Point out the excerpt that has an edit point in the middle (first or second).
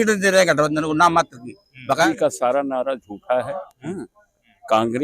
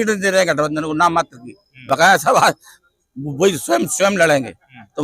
first